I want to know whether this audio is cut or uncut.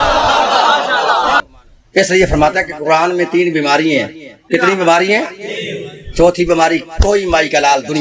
cut